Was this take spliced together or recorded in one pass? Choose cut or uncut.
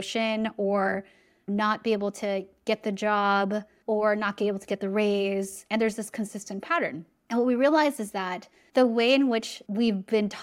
uncut